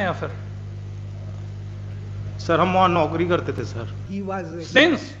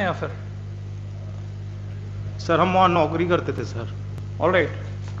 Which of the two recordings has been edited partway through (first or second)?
first